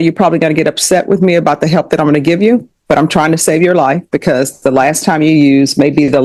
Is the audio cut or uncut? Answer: uncut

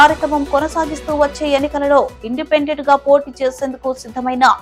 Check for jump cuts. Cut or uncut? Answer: uncut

